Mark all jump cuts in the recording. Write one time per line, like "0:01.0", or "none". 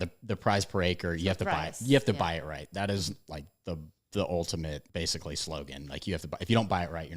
0:03.9
0:04.9